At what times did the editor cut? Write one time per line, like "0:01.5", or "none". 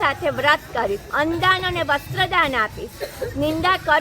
0:01.1